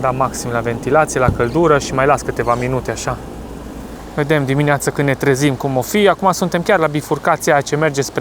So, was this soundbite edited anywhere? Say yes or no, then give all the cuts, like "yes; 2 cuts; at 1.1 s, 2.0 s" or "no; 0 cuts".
yes; 1 cut; at 4.0 s